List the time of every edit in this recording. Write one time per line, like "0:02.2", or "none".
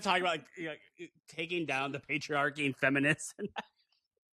0:02.0